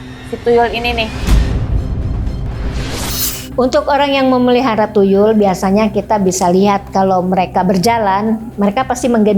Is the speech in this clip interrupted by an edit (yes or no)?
yes